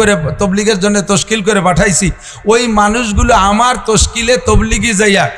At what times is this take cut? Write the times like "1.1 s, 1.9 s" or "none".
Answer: none